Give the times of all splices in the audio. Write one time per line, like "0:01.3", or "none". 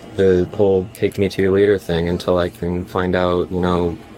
none